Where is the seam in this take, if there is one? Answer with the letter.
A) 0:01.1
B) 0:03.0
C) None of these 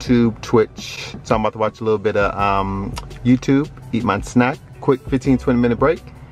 C